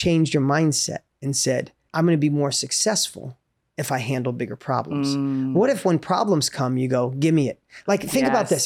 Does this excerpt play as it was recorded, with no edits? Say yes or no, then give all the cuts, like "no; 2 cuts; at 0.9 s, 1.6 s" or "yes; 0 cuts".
no; 1 cut; at 1.8 s